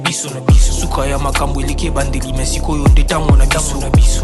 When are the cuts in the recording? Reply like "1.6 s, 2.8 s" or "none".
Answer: none